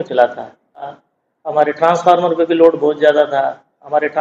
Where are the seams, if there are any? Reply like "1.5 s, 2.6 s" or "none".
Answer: 1.0 s